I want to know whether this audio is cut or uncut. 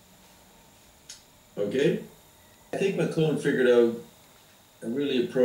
cut